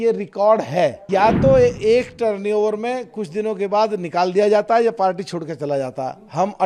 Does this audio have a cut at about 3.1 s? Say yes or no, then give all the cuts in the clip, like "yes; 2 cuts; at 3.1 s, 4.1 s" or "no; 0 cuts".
no; 1 cut; at 1.0 s